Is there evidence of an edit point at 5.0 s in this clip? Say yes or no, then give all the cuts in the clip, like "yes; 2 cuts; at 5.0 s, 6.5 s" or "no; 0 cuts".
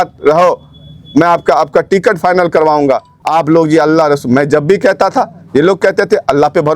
no; 1 cut; at 3.1 s